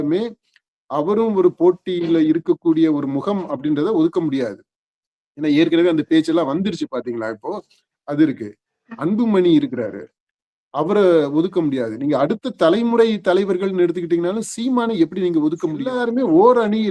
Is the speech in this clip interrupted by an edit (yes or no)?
yes